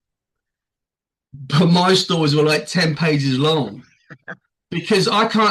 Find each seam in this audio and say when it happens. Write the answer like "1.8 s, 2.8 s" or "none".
none